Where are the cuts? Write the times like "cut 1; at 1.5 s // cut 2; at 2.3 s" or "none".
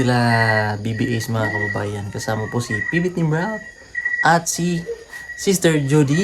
none